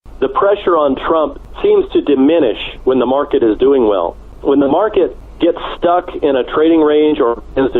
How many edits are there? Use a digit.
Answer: 3